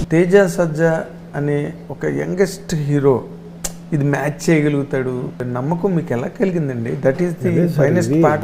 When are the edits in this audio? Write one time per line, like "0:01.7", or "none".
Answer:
0:05.5